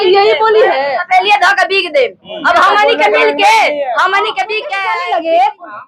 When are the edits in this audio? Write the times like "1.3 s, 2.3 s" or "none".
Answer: 4.7 s